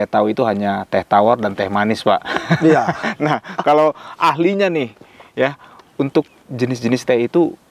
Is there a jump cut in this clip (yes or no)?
no